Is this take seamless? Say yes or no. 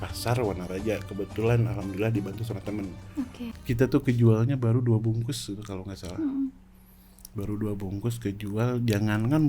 no